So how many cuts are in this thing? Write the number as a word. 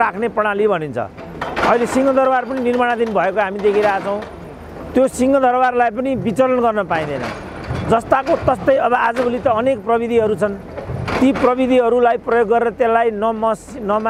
zero